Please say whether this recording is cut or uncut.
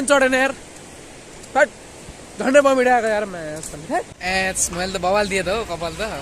cut